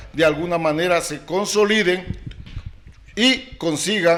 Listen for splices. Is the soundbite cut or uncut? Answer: uncut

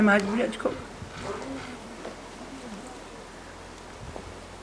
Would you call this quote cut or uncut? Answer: uncut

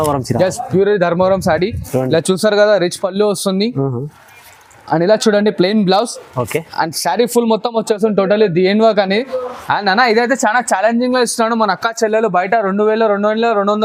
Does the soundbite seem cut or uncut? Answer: uncut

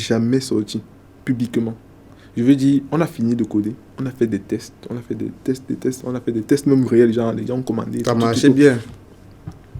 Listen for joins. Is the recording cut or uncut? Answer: uncut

